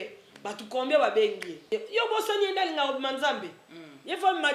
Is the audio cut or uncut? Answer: cut